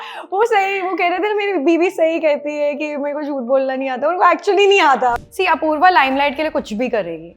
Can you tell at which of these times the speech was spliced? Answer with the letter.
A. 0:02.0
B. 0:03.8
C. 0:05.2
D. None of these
C